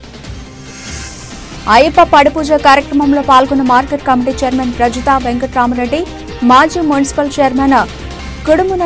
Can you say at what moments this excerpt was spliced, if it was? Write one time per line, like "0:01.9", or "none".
0:00.9